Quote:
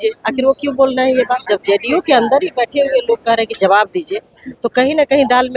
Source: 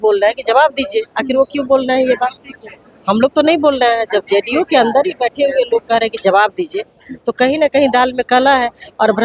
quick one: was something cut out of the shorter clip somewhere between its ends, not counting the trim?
yes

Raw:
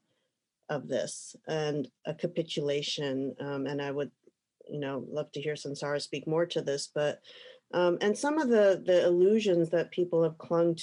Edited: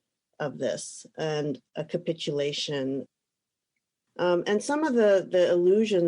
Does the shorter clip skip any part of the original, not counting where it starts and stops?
yes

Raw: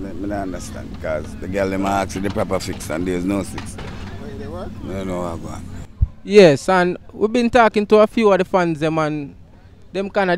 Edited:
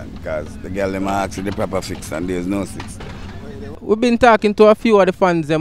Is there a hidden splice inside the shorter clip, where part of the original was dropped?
yes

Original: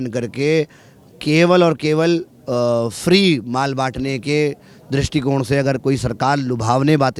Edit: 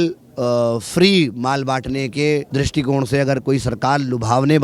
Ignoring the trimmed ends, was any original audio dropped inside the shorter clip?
yes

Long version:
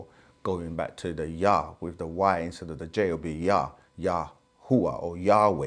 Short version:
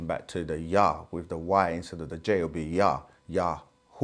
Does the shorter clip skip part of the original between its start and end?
no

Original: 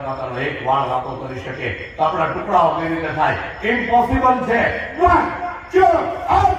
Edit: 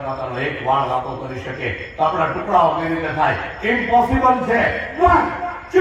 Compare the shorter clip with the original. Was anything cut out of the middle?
no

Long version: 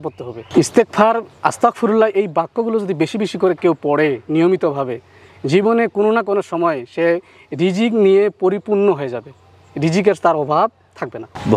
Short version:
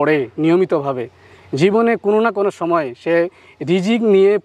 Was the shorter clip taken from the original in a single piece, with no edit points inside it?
yes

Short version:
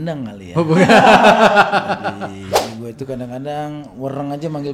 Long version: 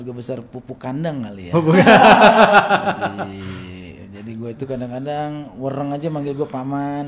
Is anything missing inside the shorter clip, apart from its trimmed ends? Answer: yes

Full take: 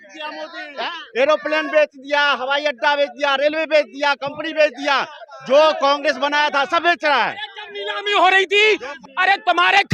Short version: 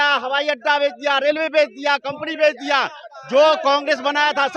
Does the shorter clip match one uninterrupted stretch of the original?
yes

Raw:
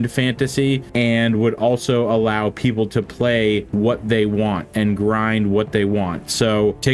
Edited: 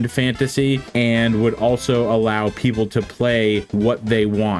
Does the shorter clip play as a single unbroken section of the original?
yes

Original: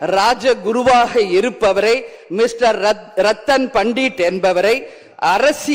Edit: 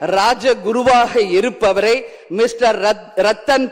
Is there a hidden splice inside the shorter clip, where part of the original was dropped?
no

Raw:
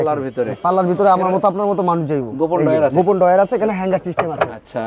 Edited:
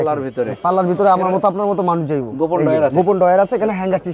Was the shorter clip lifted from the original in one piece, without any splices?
yes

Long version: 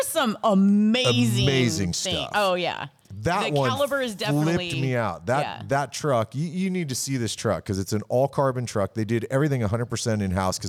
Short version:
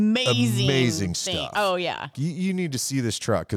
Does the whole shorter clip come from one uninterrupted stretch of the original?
no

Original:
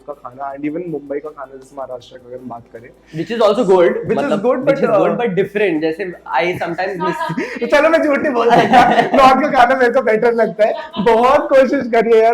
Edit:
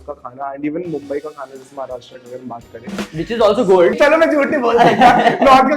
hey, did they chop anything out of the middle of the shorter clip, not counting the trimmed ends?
yes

